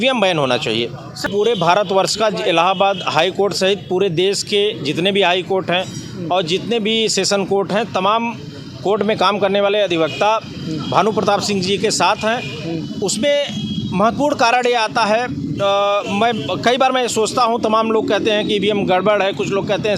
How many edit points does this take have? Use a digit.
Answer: 1